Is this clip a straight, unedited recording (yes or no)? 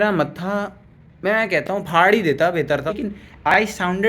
no